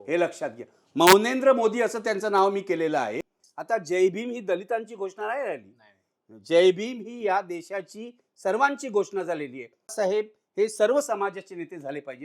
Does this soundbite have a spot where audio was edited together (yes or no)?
yes